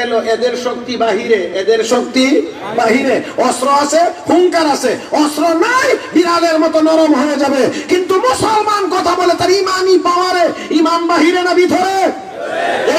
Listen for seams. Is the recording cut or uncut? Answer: uncut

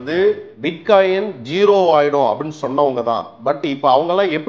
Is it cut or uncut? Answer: uncut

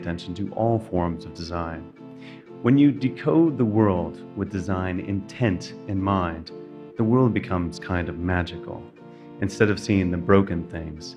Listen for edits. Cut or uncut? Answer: uncut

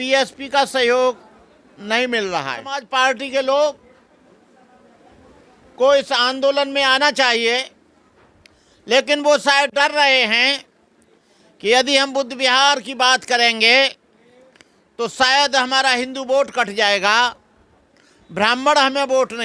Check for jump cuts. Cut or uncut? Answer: cut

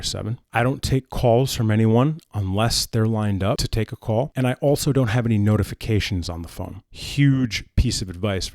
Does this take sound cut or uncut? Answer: cut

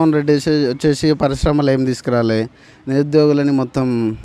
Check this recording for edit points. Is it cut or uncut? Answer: uncut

